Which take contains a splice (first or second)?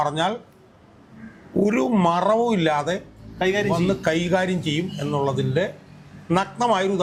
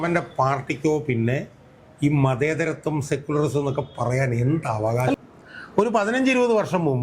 second